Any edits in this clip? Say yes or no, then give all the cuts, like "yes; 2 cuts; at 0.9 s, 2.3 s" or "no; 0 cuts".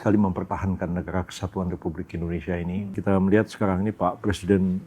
yes; 1 cut; at 3.0 s